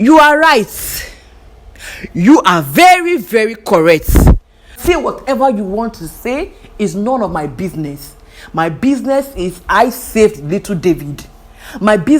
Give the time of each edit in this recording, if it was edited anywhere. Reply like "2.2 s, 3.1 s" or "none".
4.8 s